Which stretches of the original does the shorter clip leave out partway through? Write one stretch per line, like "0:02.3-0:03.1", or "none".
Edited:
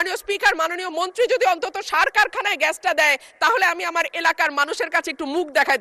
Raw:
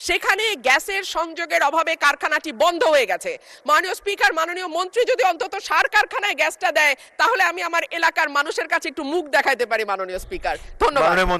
none

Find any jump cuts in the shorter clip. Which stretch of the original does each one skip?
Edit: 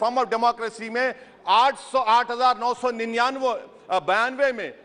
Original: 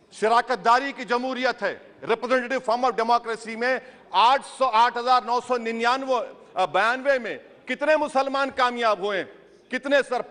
none

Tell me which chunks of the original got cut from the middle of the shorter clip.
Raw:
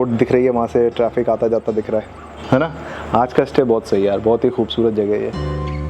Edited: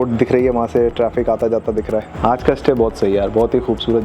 0:02.1-0:03.0

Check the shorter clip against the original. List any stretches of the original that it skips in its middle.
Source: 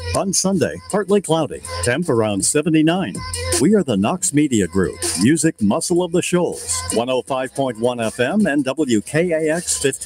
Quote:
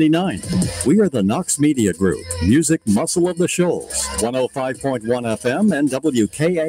none

